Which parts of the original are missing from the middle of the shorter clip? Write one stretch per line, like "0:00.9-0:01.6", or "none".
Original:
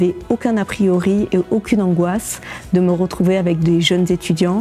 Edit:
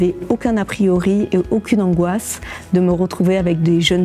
none